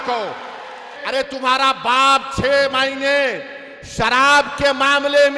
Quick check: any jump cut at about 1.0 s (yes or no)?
yes